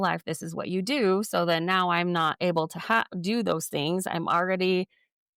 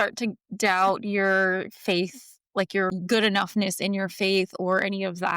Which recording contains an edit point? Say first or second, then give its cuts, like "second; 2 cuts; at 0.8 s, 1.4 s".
second; 1 cut; at 2.9 s